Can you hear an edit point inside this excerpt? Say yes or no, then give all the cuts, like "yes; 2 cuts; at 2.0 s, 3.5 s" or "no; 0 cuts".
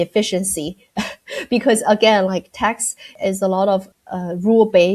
yes; 1 cut; at 3.1 s